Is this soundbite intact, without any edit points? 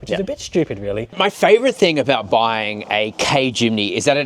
no; 1 cut; at 1.2 s

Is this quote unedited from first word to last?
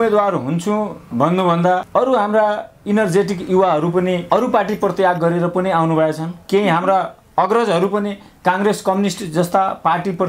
yes; 0 cuts

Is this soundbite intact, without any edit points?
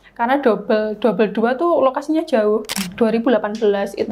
no; 1 cut; at 2.8 s

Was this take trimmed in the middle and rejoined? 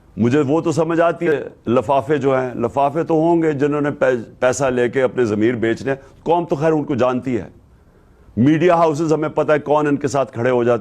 yes; 1 cut; at 1.3 s

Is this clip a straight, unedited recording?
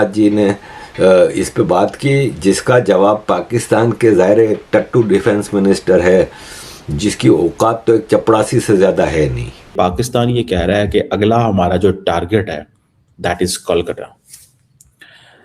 no; 1 cut; at 9.7 s

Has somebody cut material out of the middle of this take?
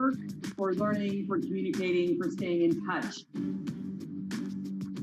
no; 0 cuts

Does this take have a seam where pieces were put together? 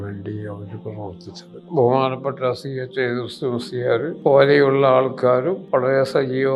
yes; 3 cuts; at 1.6 s, 4.1 s, 5.6 s

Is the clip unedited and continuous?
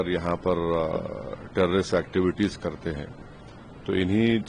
yes; 0 cuts

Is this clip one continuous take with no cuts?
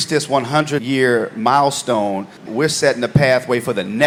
yes; 0 cuts

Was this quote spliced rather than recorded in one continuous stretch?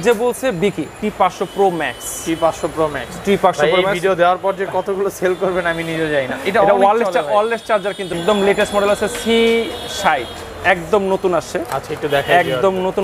yes; 2 cuts; at 1.0 s, 8.2 s

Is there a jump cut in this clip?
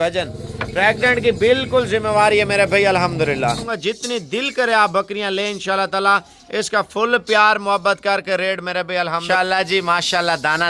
yes; 2 cuts; at 3.7 s, 9.2 s

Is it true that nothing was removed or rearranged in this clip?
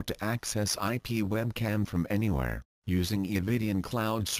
no; 1 cut; at 1.9 s

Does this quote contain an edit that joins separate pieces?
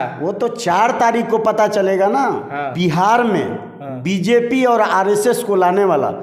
yes; 1 cut; at 2.7 s

